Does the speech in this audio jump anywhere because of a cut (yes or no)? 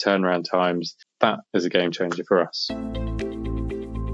yes